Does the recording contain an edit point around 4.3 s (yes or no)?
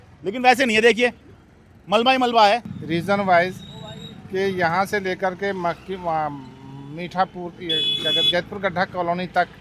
no